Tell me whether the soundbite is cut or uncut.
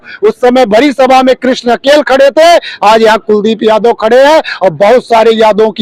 uncut